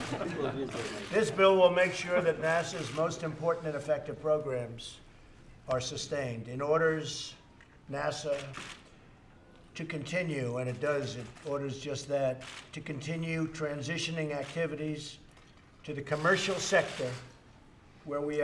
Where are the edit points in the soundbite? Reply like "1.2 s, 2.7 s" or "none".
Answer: 4.4 s